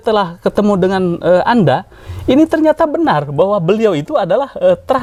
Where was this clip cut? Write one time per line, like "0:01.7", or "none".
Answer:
none